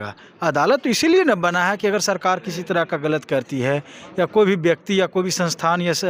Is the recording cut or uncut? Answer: uncut